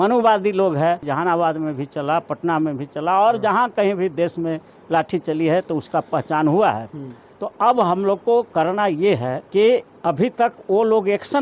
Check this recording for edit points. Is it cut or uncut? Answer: cut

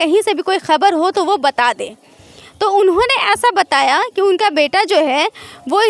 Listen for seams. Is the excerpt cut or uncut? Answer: uncut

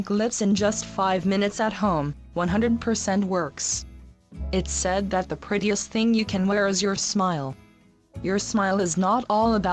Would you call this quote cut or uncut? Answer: cut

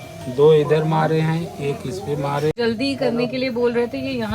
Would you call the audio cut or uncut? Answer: cut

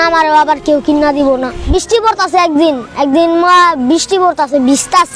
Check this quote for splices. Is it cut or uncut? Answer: cut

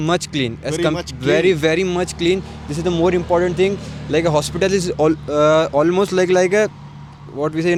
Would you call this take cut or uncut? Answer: uncut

